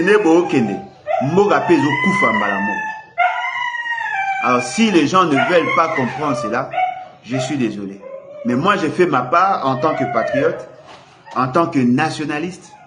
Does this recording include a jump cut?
no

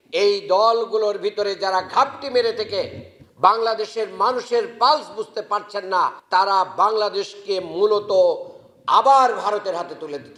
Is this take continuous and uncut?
yes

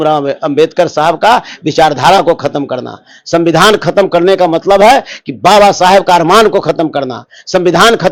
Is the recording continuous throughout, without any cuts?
yes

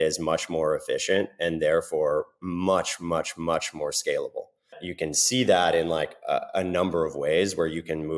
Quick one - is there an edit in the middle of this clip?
yes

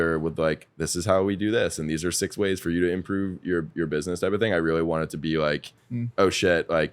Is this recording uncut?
yes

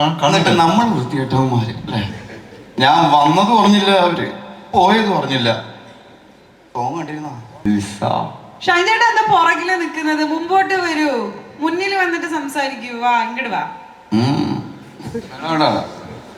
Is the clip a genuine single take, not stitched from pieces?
no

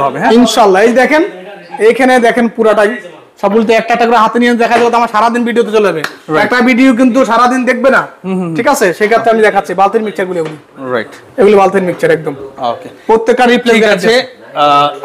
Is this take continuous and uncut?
yes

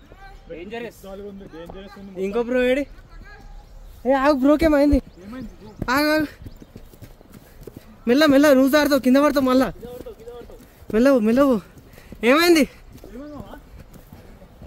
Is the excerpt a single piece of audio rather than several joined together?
yes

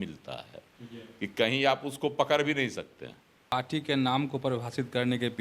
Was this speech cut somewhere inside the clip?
yes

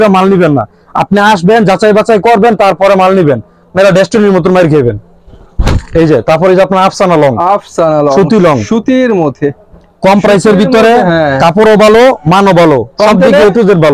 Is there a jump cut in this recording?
no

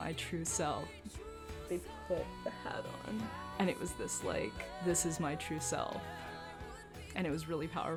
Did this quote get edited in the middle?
no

